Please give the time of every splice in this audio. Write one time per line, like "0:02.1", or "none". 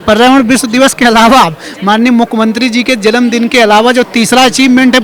none